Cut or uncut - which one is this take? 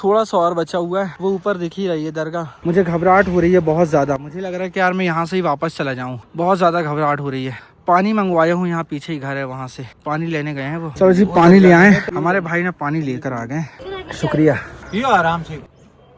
uncut